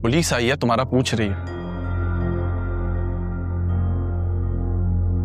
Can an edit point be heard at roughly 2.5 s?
no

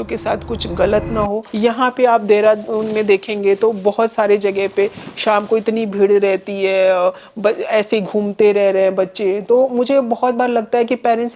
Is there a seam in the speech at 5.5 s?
no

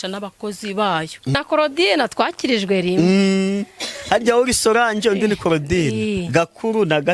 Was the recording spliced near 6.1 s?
no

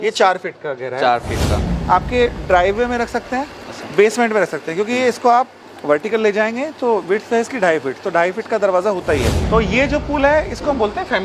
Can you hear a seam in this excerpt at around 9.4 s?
yes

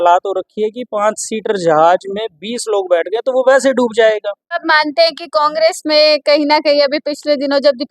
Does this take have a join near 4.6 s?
yes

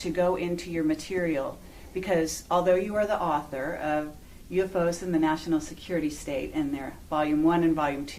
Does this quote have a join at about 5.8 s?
no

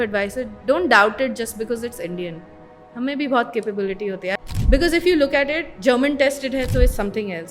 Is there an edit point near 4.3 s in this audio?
yes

